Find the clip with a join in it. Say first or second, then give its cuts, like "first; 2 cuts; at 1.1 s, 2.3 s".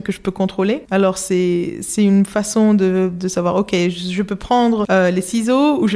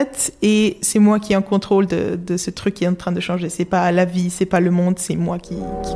first; 2 cuts; at 0.8 s, 4.9 s